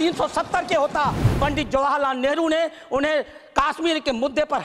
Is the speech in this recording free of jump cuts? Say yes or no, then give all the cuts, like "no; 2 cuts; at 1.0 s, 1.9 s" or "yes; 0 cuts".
no; 1 cut; at 1.3 s